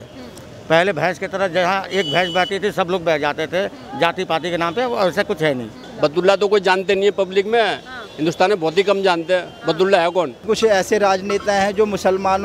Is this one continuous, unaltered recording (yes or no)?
no